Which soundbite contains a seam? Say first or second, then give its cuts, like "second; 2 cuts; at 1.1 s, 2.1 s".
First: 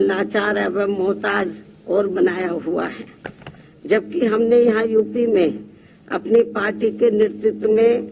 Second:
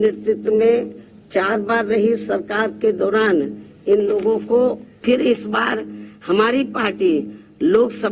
second; 1 cut; at 4.9 s